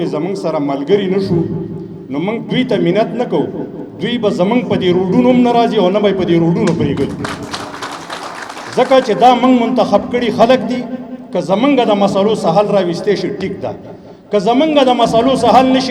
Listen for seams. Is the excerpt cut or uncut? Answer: uncut